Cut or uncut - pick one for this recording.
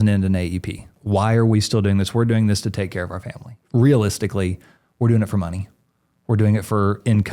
cut